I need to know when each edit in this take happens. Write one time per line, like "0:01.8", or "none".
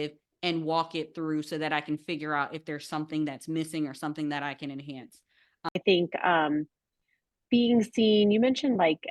0:05.8